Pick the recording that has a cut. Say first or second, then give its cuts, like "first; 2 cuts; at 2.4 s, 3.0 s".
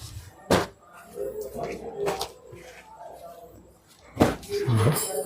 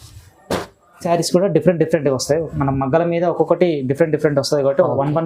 second; 1 cut; at 1.0 s